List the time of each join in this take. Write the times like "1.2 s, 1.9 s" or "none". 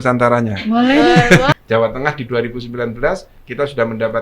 1.5 s